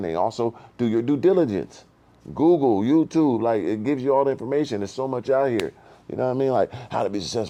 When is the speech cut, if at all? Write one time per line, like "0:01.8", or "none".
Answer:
none